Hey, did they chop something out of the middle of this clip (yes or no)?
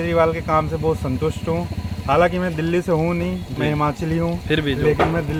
no